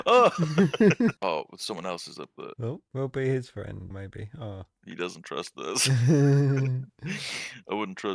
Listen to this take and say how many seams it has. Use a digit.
1